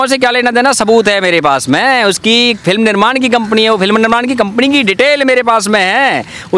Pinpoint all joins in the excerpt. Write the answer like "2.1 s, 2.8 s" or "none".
none